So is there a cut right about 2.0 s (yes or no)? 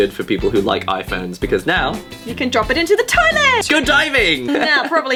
no